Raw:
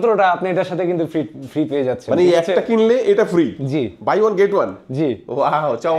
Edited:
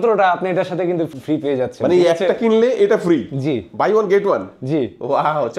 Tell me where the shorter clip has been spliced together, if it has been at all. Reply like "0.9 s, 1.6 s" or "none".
1.1 s

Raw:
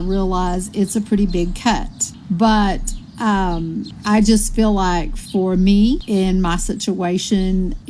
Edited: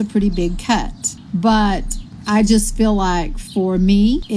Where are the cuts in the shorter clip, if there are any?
2.1 s

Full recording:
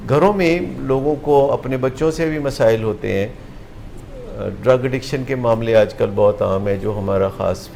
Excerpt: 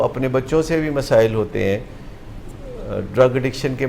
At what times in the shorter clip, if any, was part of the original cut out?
none

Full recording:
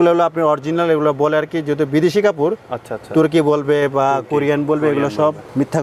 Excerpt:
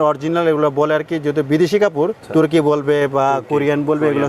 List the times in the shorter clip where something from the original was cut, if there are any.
2.2 s

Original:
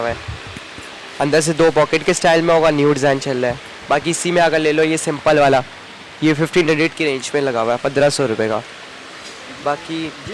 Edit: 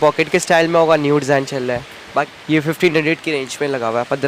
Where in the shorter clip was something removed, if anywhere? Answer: 2.3 s

